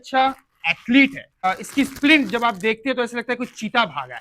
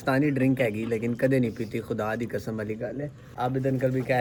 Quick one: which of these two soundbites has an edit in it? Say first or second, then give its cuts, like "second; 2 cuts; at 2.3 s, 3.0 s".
first; 1 cut; at 1.3 s